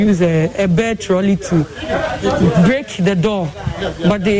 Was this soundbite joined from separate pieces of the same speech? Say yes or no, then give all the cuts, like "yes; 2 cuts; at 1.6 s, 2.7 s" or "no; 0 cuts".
no; 0 cuts